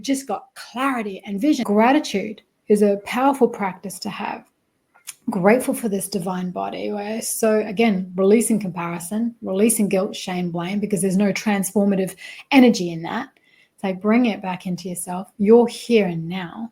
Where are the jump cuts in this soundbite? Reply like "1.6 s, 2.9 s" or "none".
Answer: 1.6 s